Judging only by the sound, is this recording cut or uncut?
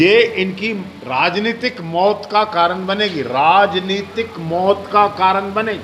uncut